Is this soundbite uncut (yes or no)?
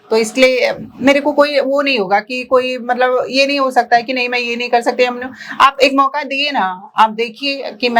yes